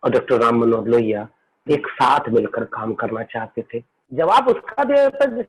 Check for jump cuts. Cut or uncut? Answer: cut